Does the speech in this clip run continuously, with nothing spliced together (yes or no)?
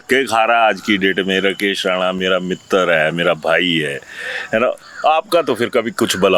yes